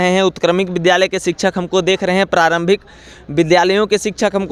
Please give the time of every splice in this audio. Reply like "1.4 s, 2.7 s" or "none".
none